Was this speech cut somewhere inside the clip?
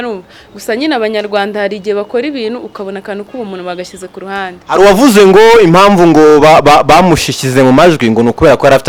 no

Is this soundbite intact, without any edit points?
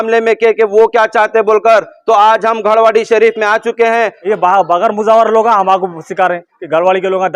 no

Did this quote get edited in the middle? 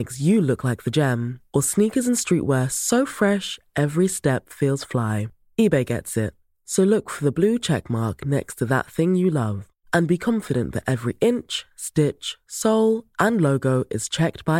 no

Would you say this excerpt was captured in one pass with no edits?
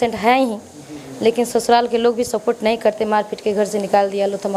yes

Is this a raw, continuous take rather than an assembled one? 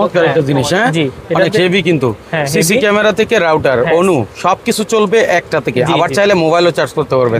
yes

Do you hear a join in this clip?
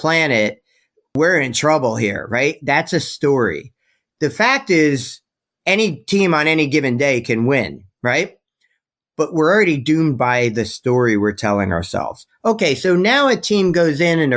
yes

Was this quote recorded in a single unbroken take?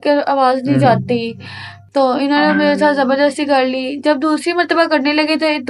yes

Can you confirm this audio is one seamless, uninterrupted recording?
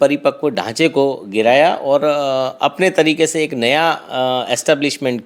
yes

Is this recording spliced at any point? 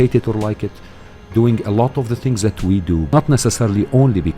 yes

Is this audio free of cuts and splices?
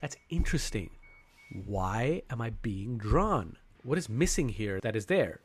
no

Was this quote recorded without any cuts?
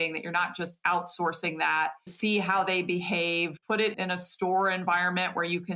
no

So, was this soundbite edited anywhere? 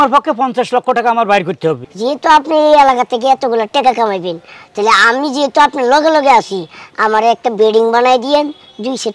yes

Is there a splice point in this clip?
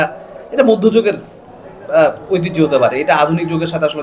no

